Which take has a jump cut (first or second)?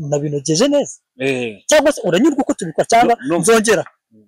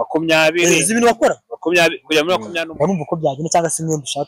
second